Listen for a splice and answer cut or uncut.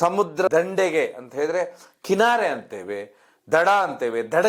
uncut